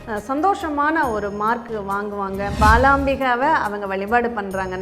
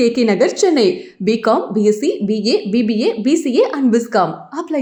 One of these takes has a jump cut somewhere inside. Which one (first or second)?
first